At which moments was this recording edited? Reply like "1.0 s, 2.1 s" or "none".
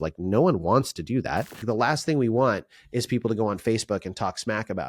1.6 s